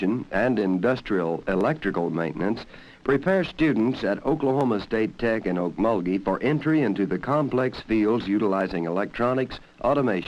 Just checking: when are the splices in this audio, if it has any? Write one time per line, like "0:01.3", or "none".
0:03.5